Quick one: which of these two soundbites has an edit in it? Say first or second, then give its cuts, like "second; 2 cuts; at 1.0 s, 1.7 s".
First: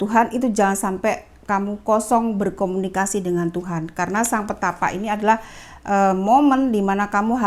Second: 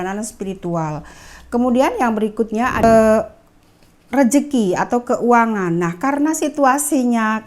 second; 1 cut; at 2.8 s